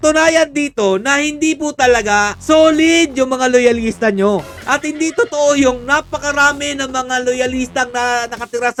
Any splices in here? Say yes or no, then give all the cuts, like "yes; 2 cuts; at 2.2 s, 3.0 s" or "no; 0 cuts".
no; 0 cuts